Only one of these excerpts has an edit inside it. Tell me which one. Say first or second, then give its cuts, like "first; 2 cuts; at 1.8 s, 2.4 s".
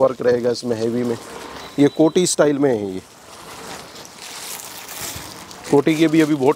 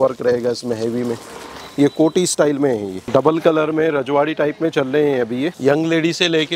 second; 2 cuts; at 3.0 s, 5.6 s